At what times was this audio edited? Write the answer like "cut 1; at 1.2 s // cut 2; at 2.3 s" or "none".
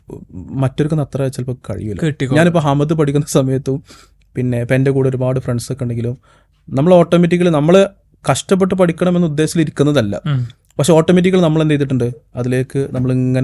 none